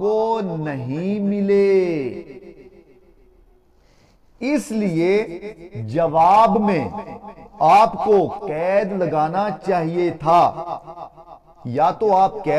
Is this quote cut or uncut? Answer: uncut